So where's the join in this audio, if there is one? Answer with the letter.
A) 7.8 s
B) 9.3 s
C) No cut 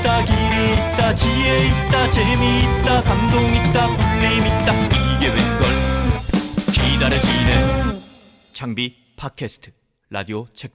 A